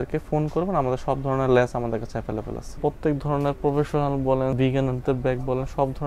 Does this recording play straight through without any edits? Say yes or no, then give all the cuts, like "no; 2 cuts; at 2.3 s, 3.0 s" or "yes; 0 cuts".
no; 2 cuts; at 2.8 s, 4.6 s